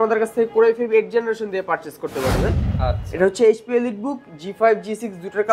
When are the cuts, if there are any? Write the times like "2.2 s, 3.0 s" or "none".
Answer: 2.7 s